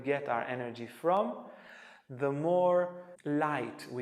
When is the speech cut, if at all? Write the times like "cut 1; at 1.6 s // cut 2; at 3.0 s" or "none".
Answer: cut 1; at 3.1 s